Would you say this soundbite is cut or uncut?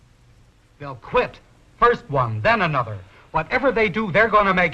cut